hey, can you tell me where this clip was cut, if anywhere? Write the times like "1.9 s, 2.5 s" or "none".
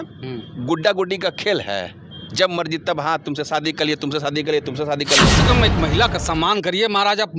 5.2 s